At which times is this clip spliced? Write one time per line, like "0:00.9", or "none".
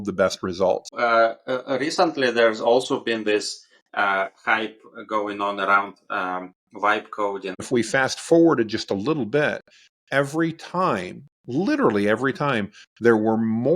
0:00.9
0:07.6